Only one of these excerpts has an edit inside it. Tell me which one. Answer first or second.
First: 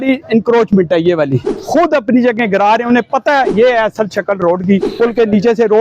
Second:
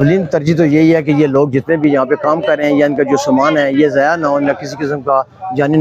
first